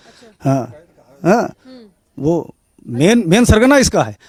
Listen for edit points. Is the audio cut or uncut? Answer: uncut